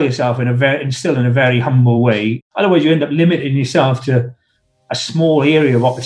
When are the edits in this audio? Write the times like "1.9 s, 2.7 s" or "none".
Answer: 2.4 s